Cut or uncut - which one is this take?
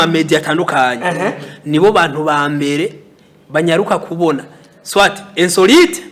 uncut